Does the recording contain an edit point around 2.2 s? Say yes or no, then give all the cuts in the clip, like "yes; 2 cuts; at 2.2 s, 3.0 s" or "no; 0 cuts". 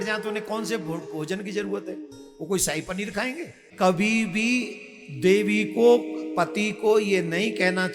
no; 1 cut; at 3.6 s